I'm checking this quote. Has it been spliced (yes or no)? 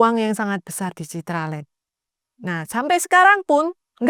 no